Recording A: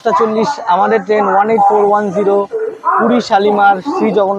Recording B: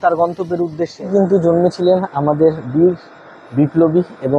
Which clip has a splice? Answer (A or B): B